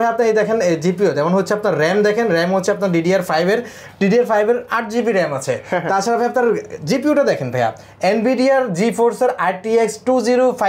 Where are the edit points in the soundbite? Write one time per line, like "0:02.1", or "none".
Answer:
none